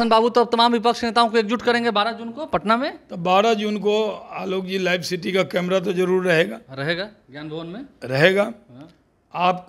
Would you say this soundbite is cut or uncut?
uncut